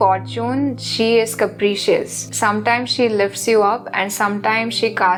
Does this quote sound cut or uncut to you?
uncut